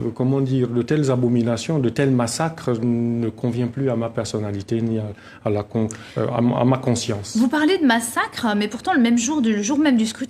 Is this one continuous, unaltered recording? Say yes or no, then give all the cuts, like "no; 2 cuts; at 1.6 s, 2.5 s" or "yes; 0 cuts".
yes; 0 cuts